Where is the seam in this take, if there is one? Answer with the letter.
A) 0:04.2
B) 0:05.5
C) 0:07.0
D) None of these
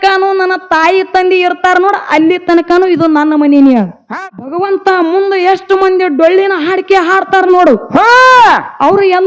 A